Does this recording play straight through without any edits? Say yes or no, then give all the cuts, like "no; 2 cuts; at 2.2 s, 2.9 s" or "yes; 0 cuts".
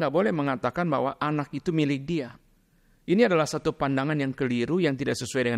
yes; 0 cuts